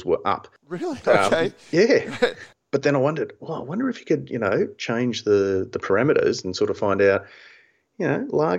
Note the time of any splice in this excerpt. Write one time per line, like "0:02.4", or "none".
0:02.5